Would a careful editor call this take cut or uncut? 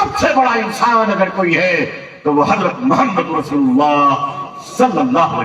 uncut